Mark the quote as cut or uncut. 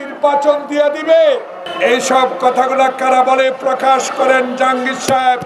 cut